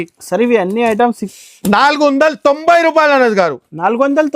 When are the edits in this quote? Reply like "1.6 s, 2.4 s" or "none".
1.2 s